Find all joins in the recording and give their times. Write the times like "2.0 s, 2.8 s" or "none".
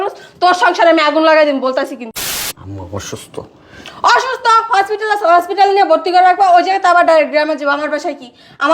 2.2 s